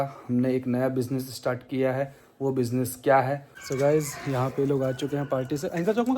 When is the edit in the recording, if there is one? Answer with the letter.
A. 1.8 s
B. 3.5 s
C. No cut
B